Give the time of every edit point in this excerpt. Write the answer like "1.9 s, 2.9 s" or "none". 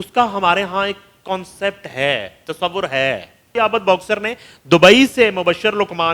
3.5 s